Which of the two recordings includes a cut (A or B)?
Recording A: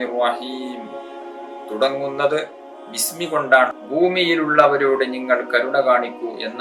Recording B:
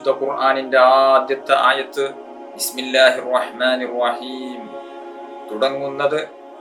A